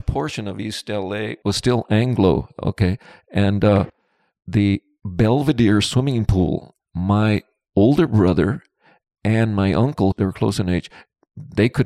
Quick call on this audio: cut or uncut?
cut